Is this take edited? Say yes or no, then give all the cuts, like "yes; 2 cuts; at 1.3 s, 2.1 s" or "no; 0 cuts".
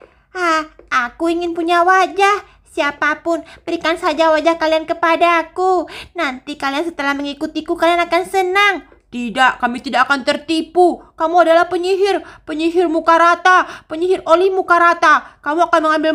no; 0 cuts